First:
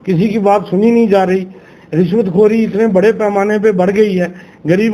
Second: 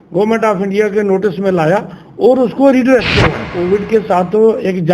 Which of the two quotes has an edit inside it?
second; 1 cut; at 3.5 s

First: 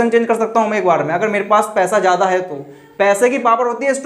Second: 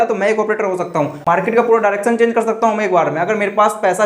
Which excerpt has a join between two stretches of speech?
second; 1 cut; at 1.2 s

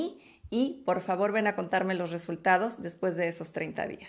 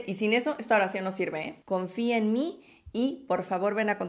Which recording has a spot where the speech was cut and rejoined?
second; 1 cut; at 1.5 s

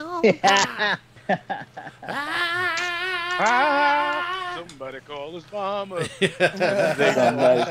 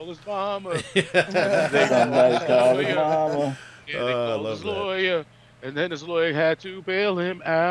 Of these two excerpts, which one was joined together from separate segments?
first; 1 cut; at 1.1 s

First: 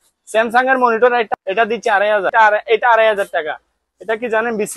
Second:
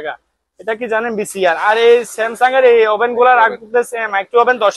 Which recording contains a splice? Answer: first; 2 cuts; at 1.3 s, 2.3 s

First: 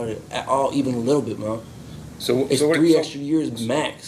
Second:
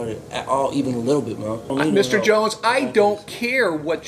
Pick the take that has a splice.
second; 1 cut; at 1.7 s

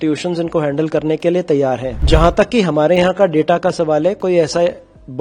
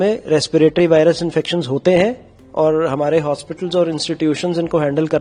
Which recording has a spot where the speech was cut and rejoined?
first; 1 cut; at 1.9 s

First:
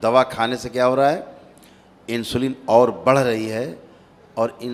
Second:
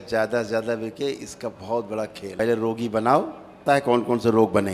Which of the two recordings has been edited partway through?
second; 2 cuts; at 2.4 s, 3.6 s

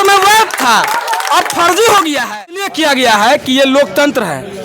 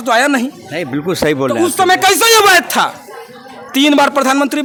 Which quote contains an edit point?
first; 1 cut; at 2.7 s

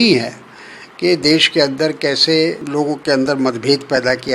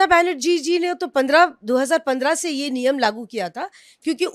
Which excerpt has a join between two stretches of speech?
first; 1 cut; at 2.6 s

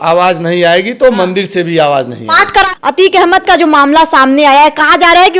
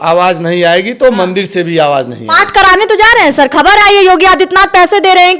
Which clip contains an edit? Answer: first; 1 cut; at 2.7 s

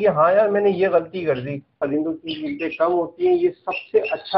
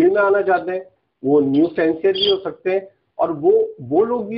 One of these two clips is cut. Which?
first; 1 cut; at 1.8 s

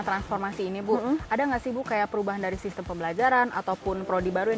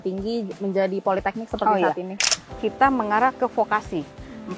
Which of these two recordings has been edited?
second; 1 cut; at 2.2 s

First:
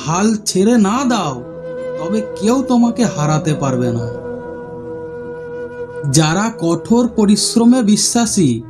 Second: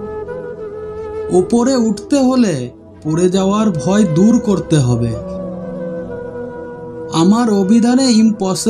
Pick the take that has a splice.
second; 1 cut; at 1.0 s

